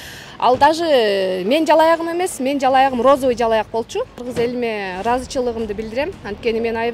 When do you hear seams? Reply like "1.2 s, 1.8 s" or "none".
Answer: 4.2 s